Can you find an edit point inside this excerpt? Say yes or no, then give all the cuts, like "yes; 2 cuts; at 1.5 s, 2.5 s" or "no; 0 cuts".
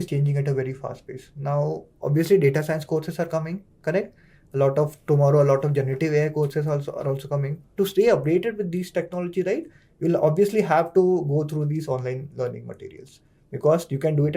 yes; 1 cut; at 7.6 s